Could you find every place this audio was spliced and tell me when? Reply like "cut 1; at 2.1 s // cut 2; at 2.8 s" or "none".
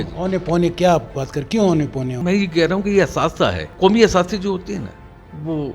cut 1; at 2.2 s // cut 2; at 3.6 s

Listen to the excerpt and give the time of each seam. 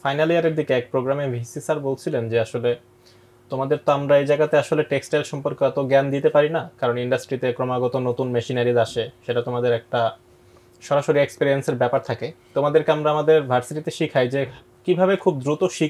none

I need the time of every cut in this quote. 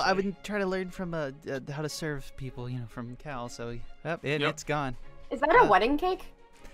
cut 1; at 3.9 s

